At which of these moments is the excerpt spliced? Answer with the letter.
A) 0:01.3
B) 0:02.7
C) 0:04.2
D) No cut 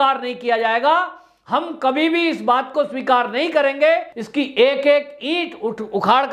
C